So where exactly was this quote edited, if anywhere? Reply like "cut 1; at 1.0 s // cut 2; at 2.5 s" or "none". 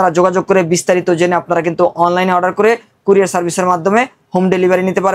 none